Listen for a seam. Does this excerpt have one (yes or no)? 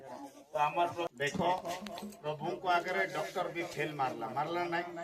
yes